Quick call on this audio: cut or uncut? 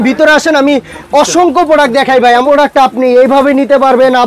cut